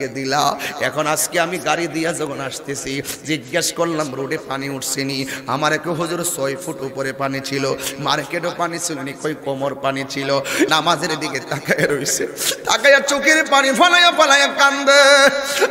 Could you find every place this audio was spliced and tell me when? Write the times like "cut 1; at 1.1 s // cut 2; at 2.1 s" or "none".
cut 1; at 10.7 s